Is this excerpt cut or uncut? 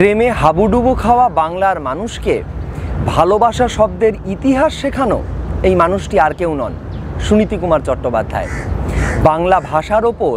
uncut